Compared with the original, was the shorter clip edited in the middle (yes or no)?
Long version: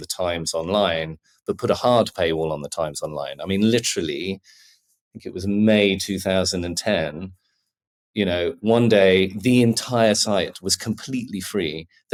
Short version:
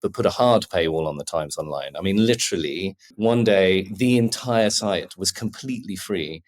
yes